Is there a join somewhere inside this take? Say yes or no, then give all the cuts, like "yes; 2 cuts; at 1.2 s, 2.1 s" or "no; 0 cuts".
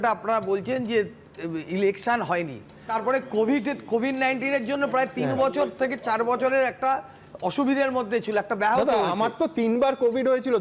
yes; 1 cut; at 2.9 s